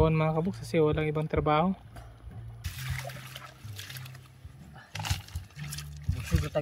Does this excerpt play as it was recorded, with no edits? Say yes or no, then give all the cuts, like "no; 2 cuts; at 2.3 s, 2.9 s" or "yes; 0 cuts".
no; 1 cut; at 2.7 s